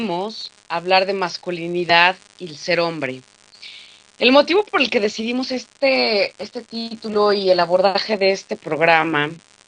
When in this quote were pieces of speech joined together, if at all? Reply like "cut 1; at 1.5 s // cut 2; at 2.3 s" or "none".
cut 1; at 6.6 s